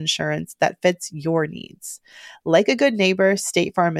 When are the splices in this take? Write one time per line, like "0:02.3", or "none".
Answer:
none